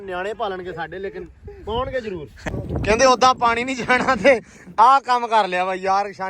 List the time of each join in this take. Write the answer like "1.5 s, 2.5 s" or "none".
2.5 s